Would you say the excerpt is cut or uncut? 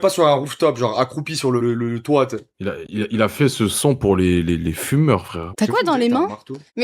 cut